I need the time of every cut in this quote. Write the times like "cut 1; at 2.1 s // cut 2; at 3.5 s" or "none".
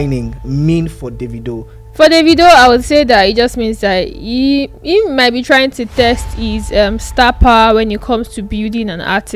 cut 1; at 1.8 s